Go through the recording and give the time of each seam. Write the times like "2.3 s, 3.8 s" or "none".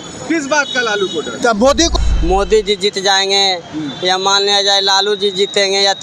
1.9 s